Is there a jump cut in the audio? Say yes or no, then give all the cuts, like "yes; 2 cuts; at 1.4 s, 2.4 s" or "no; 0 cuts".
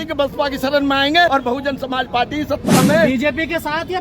yes; 1 cut; at 1.3 s